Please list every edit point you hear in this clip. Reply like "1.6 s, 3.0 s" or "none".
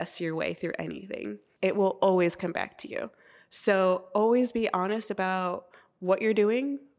none

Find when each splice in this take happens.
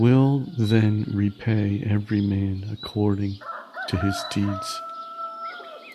4.6 s

